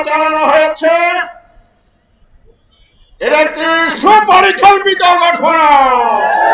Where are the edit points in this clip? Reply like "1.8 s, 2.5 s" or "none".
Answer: none